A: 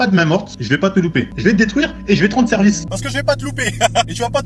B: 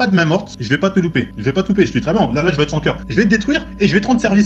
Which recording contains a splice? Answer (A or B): A